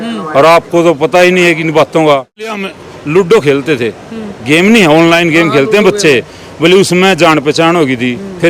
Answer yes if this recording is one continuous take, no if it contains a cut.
no